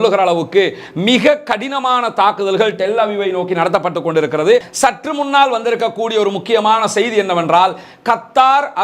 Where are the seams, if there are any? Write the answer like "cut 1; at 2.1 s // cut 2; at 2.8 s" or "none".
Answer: cut 1; at 4.7 s